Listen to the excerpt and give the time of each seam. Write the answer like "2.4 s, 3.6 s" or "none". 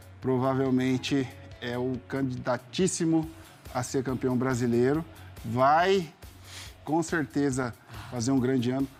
none